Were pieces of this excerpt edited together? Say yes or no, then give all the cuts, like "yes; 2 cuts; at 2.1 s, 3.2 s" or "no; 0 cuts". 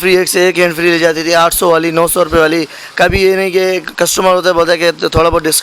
no; 0 cuts